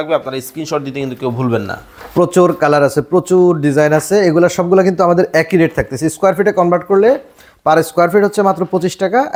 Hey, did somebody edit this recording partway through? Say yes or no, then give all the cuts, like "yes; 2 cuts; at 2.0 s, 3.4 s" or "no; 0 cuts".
no; 0 cuts